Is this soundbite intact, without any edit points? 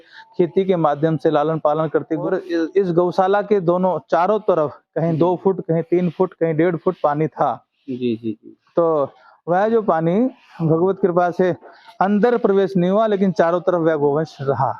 no; 1 cut; at 2.2 s

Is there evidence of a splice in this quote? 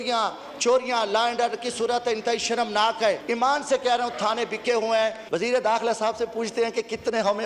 yes; 2 cuts; at 3.2 s, 5.2 s

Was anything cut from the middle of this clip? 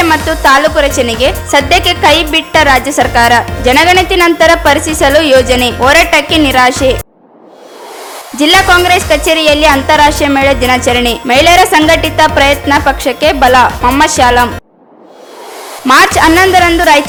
no; 0 cuts

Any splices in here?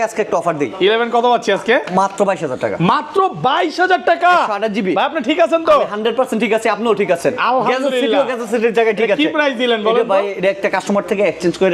no; 0 cuts

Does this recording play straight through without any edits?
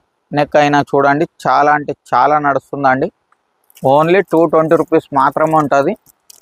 yes; 0 cuts

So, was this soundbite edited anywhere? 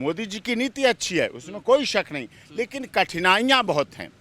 no; 0 cuts

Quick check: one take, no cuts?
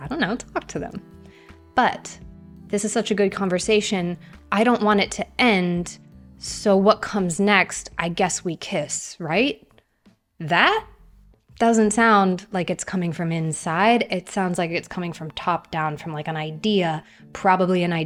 yes; 0 cuts

